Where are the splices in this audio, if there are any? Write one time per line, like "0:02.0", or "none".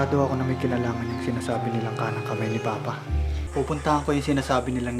0:03.4